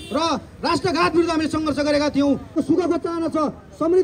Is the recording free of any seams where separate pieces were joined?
no; 1 cut; at 2.5 s

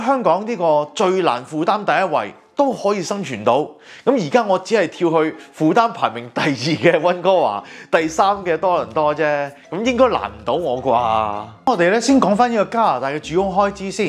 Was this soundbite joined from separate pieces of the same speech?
no; 0 cuts

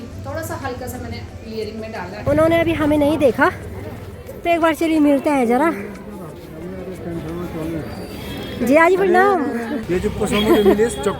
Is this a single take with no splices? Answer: no; 2 cuts; at 2.1 s, 9.8 s

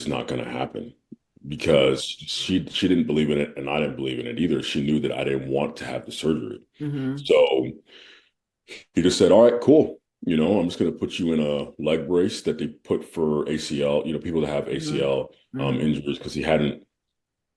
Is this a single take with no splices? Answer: yes; 0 cuts

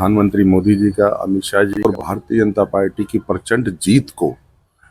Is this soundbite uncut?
no; 1 cut; at 1.8 s

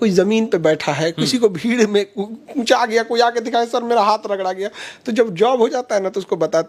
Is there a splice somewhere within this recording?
no; 0 cuts

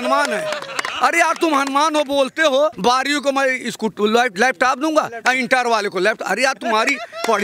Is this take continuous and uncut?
no; 1 cut; at 2.8 s

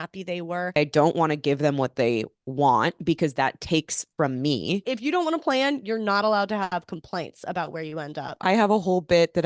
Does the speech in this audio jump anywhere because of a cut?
yes; 3 cuts; at 0.8 s, 4.9 s, 8.4 s

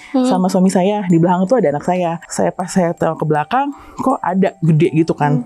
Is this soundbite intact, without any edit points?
no; 1 cut; at 2.2 s

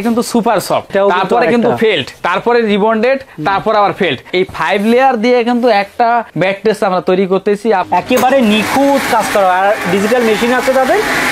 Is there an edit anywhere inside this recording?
yes; 5 cuts; at 0.9 s, 2.2 s, 4.2 s, 6.3 s, 7.9 s

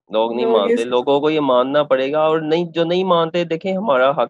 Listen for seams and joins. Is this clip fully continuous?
yes; 0 cuts

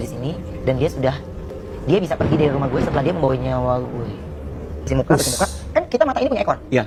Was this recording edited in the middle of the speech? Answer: no; 0 cuts

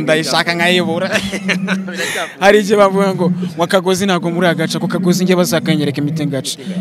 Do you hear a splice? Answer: no; 0 cuts

